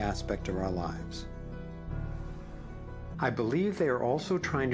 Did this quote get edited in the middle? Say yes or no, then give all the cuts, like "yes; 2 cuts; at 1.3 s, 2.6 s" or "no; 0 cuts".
yes; 1 cut; at 3.1 s